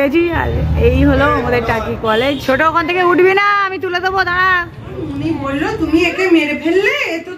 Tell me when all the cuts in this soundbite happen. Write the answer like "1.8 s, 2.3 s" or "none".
2.4 s, 5.1 s